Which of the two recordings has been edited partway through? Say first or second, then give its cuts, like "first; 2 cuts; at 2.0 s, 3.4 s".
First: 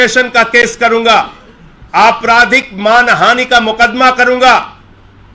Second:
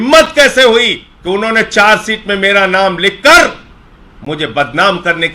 second; 1 cut; at 1.1 s